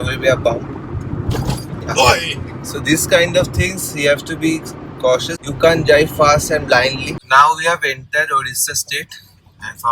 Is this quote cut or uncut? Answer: cut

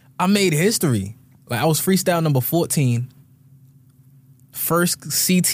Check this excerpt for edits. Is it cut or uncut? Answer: uncut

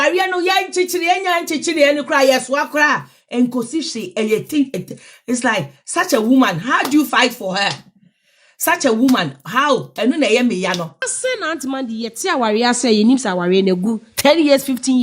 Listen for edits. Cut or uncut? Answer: cut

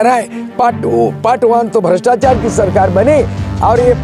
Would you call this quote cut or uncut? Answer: uncut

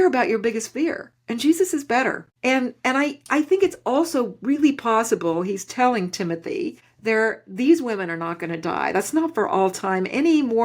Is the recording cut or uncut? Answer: cut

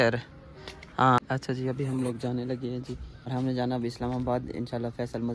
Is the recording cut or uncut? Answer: cut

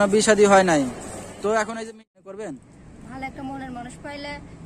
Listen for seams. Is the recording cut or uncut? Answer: cut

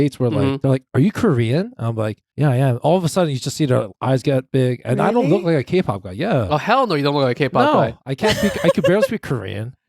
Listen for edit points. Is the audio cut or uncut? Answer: cut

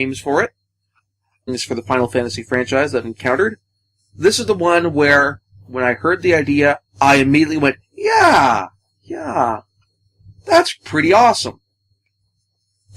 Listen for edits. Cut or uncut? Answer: uncut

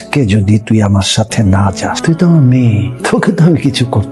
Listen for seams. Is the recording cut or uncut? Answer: cut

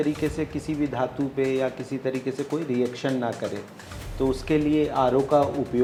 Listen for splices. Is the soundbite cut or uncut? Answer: uncut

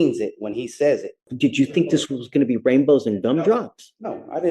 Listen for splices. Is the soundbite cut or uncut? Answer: cut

